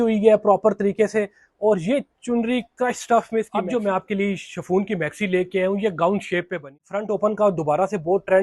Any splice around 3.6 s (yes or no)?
yes